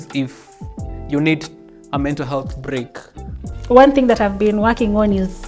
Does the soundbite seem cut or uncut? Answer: cut